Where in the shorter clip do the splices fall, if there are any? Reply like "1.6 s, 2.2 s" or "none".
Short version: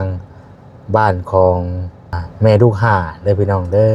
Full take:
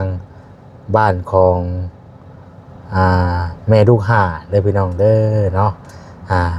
2.2 s